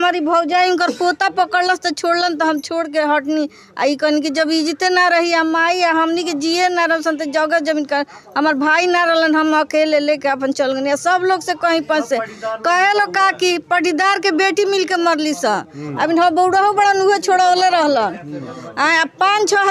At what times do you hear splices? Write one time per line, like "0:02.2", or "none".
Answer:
none